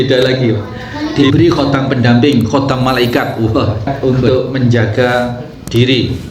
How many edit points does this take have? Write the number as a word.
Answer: two